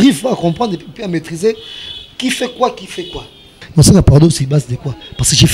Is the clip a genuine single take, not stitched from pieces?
no; 1 cut; at 3.5 s

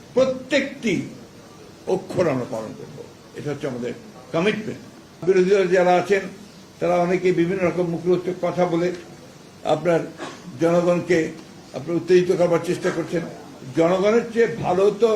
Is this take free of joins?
no; 1 cut; at 5.2 s

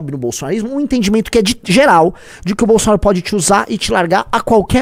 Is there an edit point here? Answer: no; 0 cuts

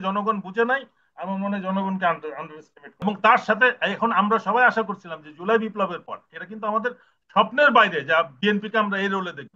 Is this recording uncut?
no; 1 cut; at 3.0 s

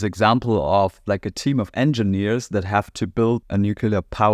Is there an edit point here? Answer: yes; 1 cut; at 3.4 s

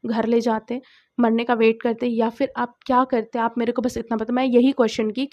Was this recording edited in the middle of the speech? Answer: no; 0 cuts

